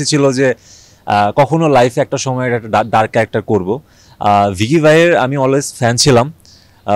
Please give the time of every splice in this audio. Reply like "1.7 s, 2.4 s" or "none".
none